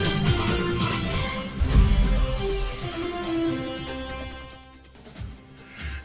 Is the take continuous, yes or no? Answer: no